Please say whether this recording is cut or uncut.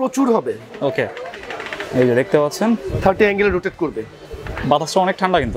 uncut